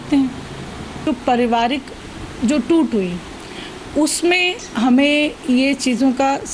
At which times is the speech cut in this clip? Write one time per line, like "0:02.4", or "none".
0:01.1